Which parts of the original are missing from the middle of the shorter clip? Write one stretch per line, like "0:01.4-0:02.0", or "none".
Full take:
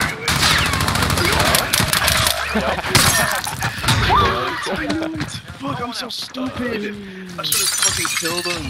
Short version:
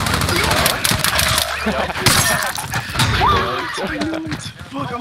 none